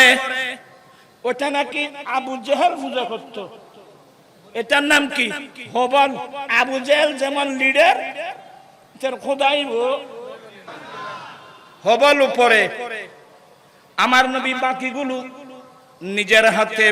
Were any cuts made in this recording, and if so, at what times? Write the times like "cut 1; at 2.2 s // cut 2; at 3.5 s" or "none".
cut 1; at 6.4 s // cut 2; at 10.9 s